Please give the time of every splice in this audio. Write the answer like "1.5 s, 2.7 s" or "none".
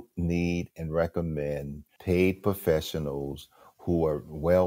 1.9 s